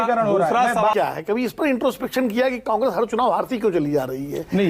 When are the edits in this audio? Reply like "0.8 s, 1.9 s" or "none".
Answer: 0.9 s